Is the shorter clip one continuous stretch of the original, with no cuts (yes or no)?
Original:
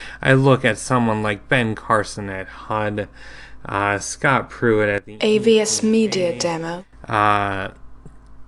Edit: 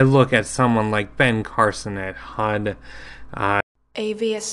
no